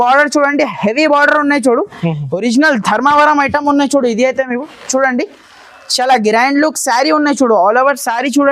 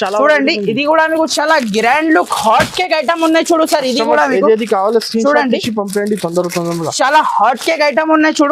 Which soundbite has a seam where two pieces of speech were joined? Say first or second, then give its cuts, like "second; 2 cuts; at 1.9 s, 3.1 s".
second; 1 cut; at 1.3 s